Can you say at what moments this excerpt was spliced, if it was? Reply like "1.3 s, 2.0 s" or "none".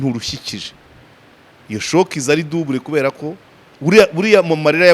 3.7 s